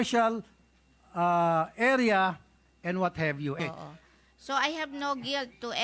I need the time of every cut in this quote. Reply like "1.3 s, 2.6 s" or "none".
3.6 s